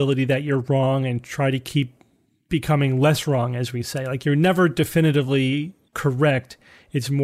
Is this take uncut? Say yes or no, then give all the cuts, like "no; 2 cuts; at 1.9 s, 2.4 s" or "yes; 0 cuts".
no; 1 cut; at 5.8 s